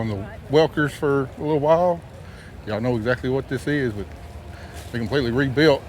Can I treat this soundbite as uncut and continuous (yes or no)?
yes